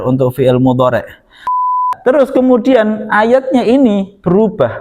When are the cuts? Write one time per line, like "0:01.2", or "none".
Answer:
0:01.7